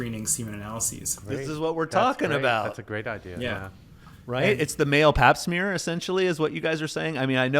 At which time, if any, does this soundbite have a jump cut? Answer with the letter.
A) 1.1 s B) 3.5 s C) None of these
A